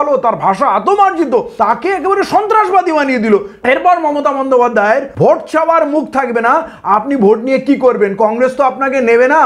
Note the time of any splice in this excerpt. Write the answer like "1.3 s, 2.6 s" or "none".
1.5 s, 3.5 s, 5.1 s